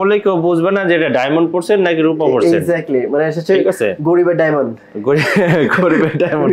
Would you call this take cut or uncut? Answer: uncut